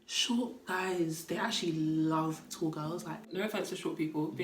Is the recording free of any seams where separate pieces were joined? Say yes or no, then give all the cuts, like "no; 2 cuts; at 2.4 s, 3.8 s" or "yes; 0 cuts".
no; 1 cut; at 3.3 s